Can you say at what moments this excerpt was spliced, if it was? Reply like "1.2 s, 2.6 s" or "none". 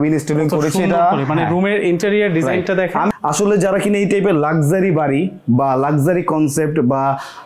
3.1 s